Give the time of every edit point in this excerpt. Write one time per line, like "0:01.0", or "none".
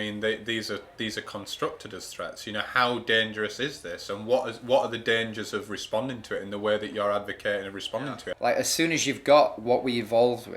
0:08.3